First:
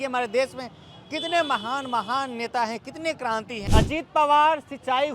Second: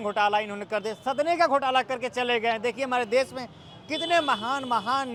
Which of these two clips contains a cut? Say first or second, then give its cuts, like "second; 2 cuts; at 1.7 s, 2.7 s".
first; 1 cut; at 3.6 s